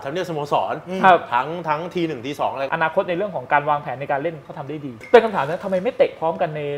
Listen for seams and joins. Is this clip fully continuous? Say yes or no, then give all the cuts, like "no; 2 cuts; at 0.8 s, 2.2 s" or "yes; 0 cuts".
no; 2 cuts; at 2.6 s, 5.0 s